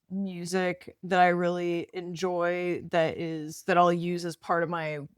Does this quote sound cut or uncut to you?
cut